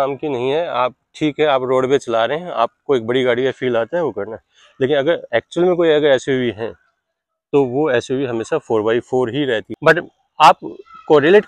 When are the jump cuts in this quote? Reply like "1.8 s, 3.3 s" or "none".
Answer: 9.7 s

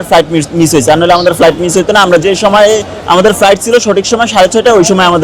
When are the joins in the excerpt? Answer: 2.2 s

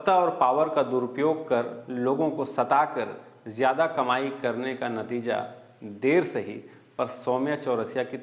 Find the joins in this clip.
none

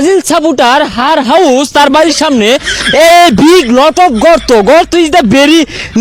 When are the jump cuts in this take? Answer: none

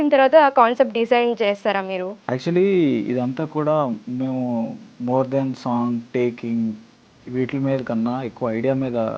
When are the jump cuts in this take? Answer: 2.1 s, 4.9 s

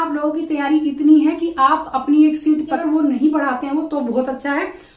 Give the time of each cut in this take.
2.8 s

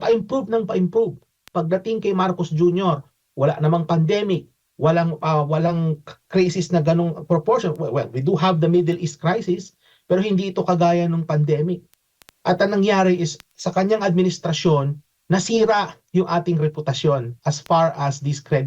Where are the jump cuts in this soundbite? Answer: none

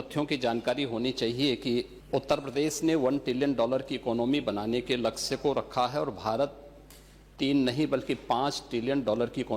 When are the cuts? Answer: 2.0 s

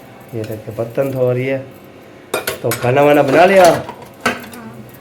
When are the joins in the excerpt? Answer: none

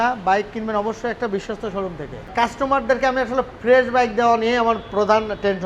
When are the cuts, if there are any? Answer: 2.3 s

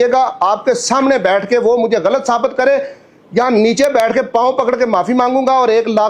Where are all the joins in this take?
none

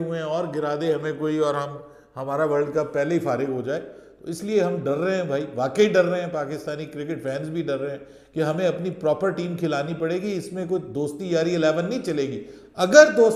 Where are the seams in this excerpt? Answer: none

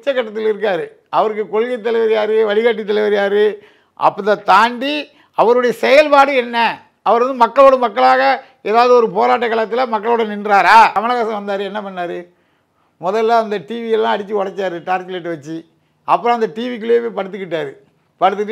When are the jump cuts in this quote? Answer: 11.0 s

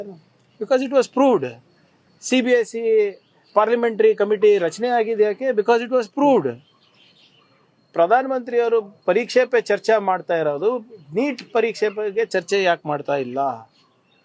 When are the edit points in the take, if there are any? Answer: none

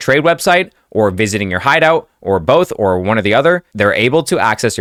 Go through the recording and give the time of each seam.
none

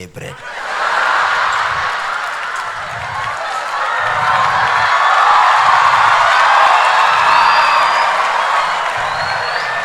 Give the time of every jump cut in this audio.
none

